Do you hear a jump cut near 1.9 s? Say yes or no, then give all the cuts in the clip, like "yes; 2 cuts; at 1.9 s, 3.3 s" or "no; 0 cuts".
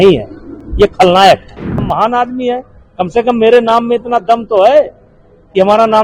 yes; 1 cut; at 1.9 s